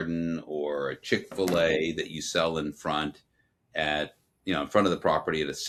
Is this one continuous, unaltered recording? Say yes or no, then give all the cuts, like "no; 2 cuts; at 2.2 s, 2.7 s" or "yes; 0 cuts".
yes; 0 cuts